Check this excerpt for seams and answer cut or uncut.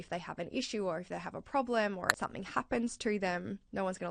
cut